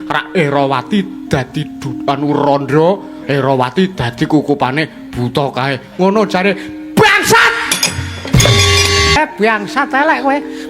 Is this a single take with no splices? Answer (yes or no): no